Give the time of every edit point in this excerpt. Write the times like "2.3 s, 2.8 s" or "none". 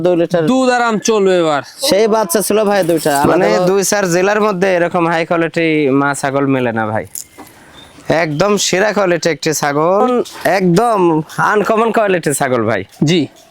3.4 s, 10.1 s

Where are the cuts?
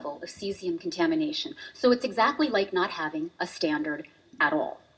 none

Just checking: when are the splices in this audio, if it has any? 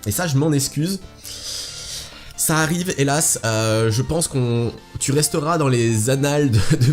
6.0 s

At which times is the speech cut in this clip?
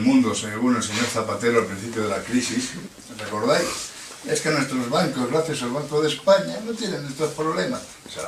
none

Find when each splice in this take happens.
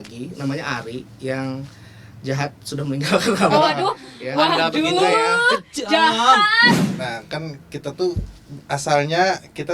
6.8 s

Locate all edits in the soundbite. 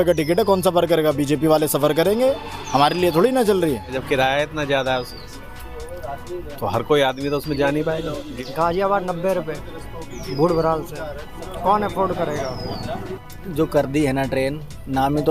3.9 s, 8.3 s, 13.3 s

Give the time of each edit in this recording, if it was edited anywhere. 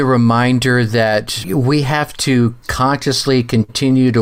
1.4 s

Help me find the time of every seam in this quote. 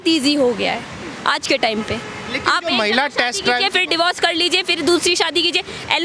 none

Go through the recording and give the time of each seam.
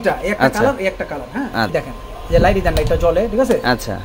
1.7 s

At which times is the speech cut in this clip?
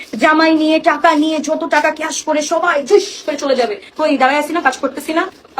none

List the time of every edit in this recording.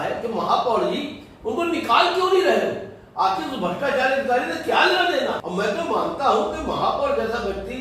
5.4 s

